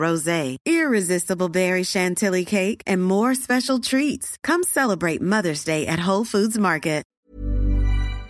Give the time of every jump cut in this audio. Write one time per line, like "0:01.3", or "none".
0:07.1